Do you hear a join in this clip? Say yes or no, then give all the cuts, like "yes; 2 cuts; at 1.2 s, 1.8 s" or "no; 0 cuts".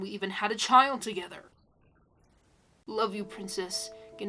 yes; 1 cut; at 2.8 s